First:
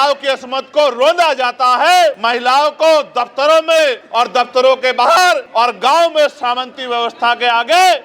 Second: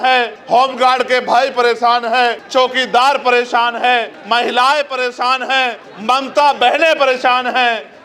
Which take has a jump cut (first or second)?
first